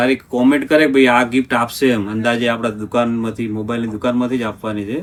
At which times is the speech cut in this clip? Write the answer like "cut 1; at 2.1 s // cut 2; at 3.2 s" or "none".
none